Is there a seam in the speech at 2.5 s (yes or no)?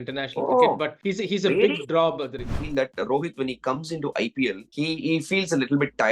yes